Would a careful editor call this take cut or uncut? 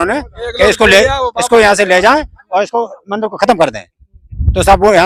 uncut